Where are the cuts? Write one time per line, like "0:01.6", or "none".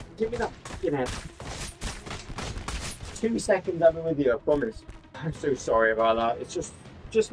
0:05.2